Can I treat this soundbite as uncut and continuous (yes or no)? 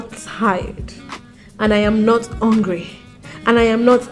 yes